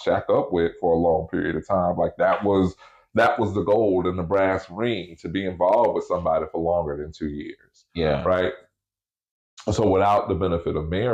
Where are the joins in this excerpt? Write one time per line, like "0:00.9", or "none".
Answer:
none